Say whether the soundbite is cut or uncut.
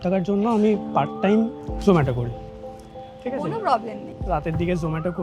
uncut